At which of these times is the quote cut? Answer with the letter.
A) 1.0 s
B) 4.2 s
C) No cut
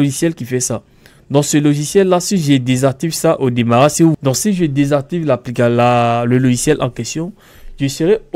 B